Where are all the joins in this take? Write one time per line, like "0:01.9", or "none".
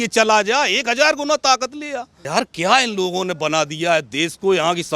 0:02.1